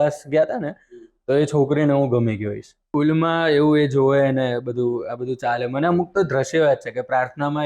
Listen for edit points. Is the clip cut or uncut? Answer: cut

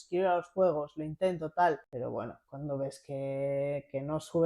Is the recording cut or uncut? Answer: cut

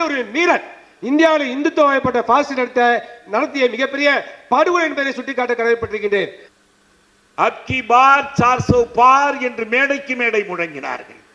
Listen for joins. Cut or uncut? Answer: cut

